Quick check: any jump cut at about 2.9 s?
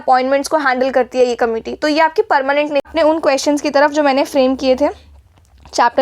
yes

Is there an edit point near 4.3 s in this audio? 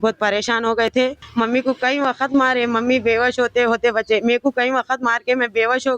no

